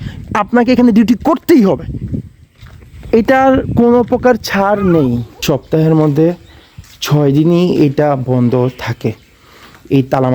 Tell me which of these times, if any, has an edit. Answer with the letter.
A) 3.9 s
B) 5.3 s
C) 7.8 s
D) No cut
B